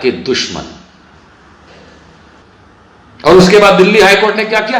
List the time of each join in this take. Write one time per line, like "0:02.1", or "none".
0:02.4

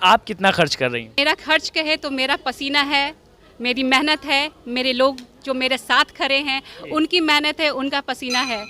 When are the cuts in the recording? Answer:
0:01.2

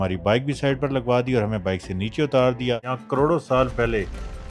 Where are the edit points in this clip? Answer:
0:02.9

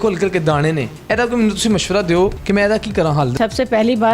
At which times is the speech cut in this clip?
0:00.9
0:02.4
0:03.3

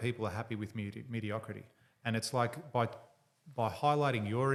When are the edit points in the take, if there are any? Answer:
none

